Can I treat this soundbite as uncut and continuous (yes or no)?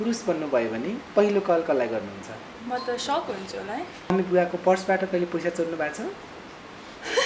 no